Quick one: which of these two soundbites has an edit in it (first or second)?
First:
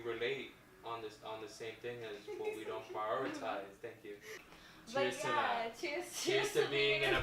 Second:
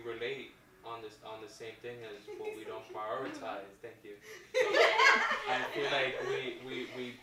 first